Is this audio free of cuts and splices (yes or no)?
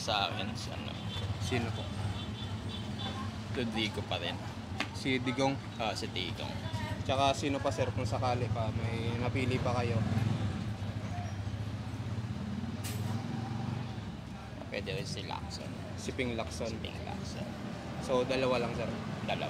yes